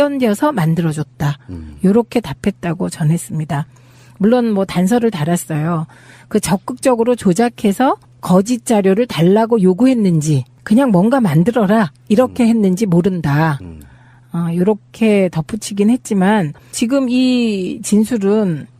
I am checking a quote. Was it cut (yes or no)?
no